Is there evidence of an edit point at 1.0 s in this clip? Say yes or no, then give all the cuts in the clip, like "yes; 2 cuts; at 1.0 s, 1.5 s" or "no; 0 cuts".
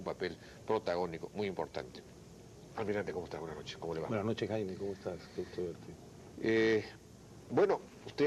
yes; 1 cut; at 1.0 s